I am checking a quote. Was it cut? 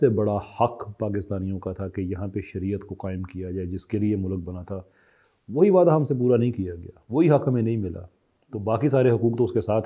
no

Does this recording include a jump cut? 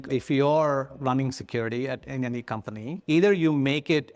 yes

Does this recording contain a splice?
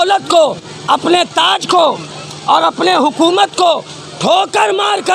no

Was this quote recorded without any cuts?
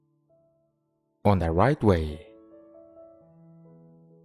no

